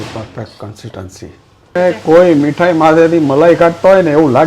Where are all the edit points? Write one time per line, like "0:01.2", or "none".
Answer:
0:01.8

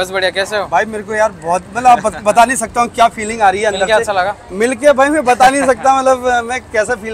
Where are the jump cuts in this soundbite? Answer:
0:03.9

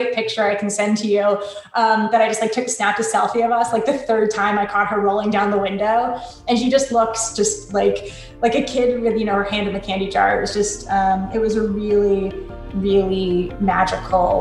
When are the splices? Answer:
0:13.5

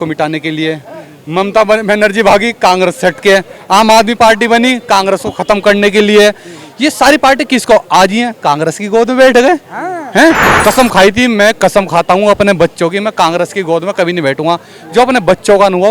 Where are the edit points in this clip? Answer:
0:10.5

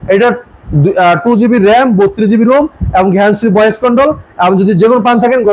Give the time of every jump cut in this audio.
none

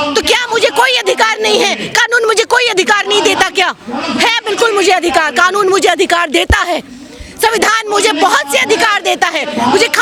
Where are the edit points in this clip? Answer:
none

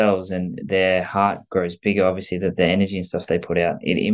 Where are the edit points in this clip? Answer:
none

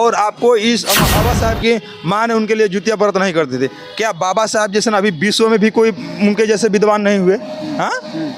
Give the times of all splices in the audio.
0:01.1

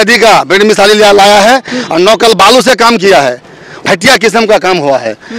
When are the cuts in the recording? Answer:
0:03.8

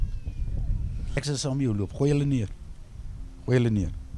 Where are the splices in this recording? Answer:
0:01.2

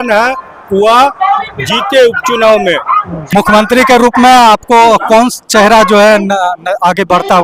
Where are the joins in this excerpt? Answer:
0:03.3

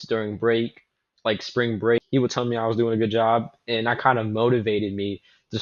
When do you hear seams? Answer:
0:02.0

